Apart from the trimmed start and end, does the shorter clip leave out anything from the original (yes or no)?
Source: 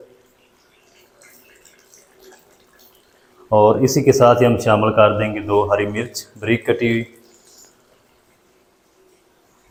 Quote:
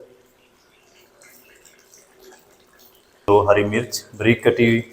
yes